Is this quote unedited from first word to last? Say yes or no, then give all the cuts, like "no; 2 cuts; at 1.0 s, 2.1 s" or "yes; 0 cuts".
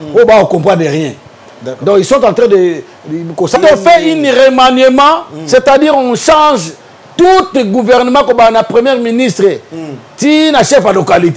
no; 1 cut; at 3.6 s